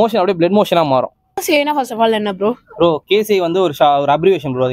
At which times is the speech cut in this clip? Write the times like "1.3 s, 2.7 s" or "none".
1.4 s